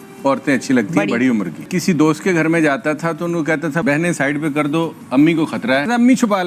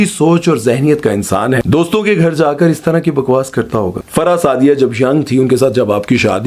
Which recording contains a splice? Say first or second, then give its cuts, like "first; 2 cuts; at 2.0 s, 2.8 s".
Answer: second; 2 cuts; at 1.6 s, 4.0 s